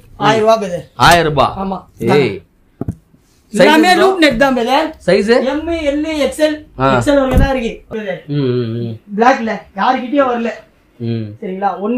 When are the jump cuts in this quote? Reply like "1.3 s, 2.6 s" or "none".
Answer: 7.9 s